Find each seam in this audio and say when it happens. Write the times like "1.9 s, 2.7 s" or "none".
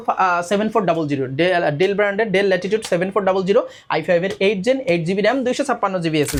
none